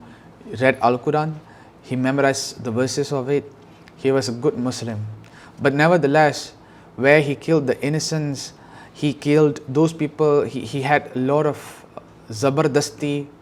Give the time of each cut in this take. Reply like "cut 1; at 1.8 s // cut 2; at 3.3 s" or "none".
none